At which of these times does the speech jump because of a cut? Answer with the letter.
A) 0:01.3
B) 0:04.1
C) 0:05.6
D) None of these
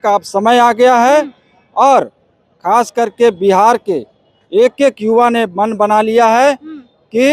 D